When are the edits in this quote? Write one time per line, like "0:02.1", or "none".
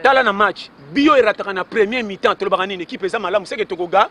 none